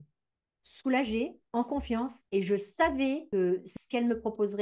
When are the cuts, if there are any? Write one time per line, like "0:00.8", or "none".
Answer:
0:01.9
0:03.2